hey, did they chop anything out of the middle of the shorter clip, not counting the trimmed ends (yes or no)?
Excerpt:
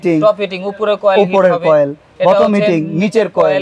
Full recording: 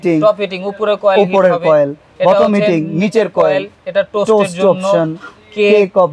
no